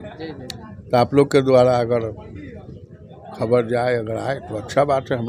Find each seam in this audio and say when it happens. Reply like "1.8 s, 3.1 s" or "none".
none